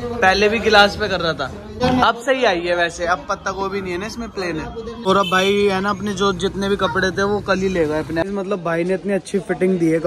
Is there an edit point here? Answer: yes; 3 cuts; at 1.6 s, 5.0 s, 8.2 s

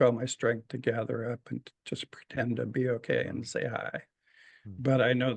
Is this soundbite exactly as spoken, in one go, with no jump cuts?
yes; 0 cuts

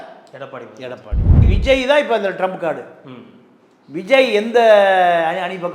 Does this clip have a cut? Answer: yes; 1 cut; at 1.4 s

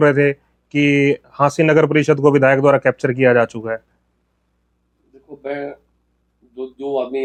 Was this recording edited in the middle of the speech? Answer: no; 0 cuts

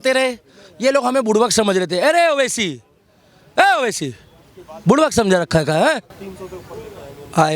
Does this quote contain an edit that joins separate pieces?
no; 0 cuts

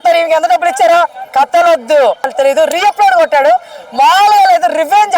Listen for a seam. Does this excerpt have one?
yes; 1 cut; at 2.3 s

